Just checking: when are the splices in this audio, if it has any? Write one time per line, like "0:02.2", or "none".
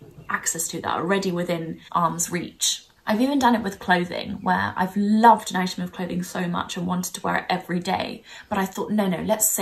0:01.8